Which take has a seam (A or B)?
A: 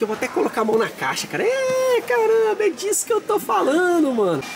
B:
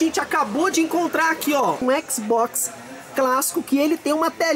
B